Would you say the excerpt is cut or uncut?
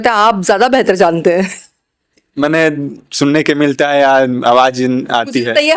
uncut